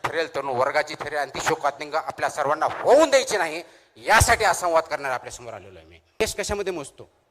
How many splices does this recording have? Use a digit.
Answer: 1